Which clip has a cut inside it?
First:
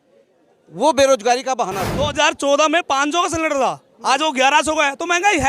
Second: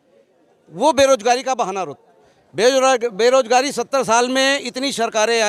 first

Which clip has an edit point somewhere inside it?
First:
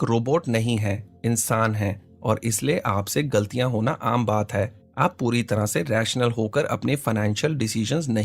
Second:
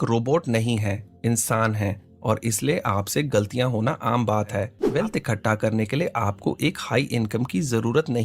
second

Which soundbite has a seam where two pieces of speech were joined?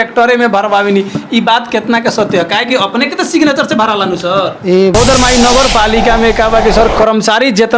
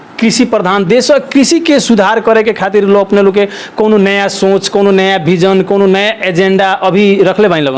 first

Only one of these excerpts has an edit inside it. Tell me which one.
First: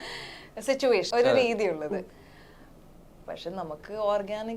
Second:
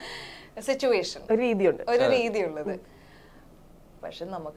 first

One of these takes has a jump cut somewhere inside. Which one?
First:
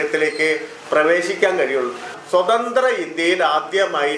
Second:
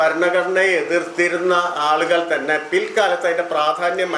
first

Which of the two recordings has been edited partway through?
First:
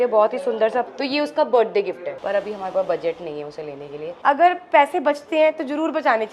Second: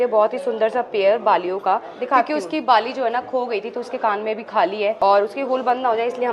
first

